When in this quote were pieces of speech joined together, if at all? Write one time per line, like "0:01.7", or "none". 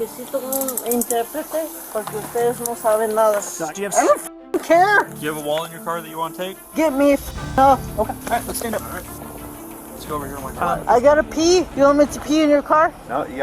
0:03.6
0:10.8